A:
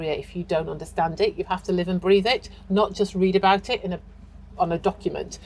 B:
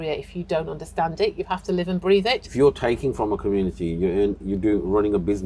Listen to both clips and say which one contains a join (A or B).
B